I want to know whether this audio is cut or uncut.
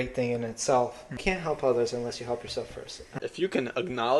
cut